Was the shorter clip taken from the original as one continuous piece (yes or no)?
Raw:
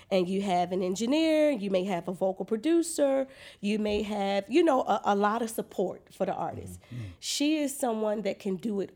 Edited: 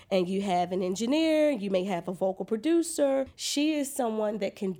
no